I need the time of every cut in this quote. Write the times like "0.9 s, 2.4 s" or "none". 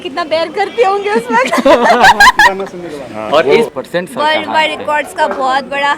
3.7 s